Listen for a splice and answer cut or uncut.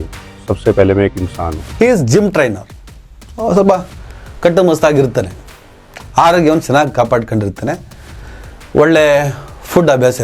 cut